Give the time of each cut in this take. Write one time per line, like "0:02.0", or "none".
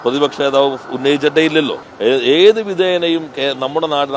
0:01.8